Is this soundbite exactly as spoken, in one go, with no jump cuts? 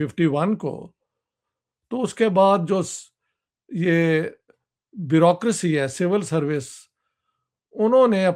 yes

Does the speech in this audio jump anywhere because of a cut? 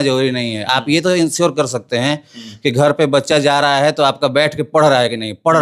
no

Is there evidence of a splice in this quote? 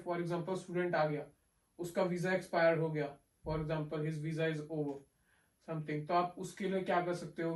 no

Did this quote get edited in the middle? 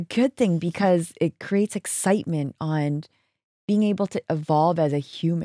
no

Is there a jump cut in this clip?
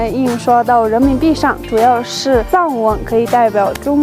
yes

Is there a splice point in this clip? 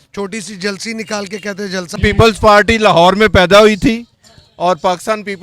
yes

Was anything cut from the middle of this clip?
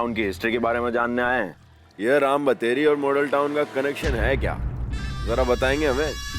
no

